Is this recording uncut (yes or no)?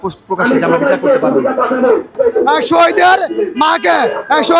no